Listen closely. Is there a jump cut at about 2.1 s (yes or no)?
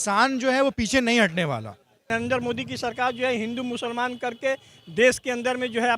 yes